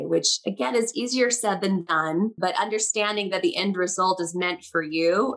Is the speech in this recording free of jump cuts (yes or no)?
no